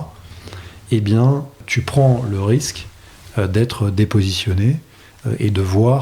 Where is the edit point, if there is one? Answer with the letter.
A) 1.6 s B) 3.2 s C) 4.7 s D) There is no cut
A